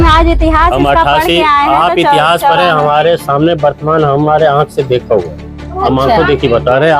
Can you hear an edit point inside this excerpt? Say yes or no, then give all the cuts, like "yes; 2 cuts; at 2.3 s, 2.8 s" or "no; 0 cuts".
no; 0 cuts